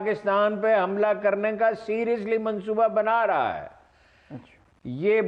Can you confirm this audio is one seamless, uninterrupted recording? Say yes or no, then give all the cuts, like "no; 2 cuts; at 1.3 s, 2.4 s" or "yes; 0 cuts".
yes; 0 cuts